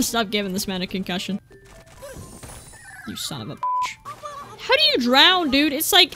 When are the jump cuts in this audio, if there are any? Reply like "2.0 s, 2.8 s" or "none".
1.5 s, 4.0 s

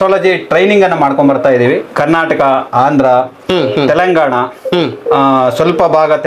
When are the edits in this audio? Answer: none

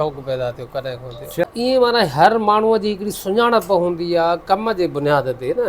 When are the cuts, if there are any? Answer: 1.4 s

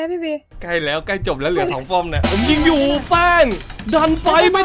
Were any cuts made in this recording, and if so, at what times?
2.2 s

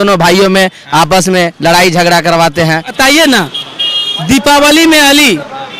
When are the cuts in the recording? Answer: 2.9 s

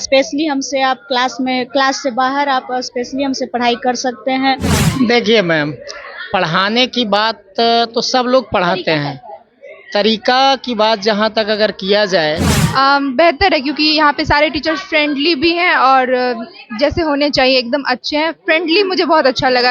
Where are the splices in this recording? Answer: 4.8 s, 12.6 s

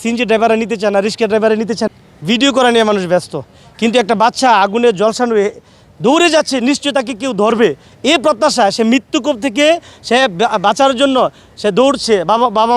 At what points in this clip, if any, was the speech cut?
1.8 s

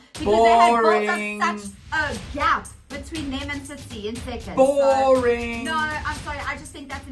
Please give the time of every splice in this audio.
1.8 s

